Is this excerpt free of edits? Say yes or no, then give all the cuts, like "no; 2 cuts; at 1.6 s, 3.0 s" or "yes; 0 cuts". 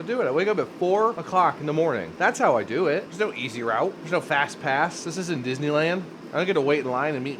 no; 5 cuts; at 1.2 s, 2.1 s, 3.1 s, 4.0 s, 6.2 s